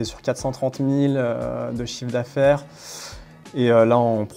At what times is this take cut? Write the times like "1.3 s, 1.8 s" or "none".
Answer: none